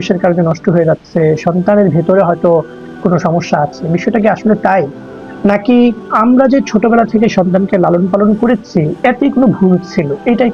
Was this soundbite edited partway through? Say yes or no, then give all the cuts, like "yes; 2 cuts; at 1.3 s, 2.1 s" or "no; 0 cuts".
yes; 2 cuts; at 6.1 s, 8.9 s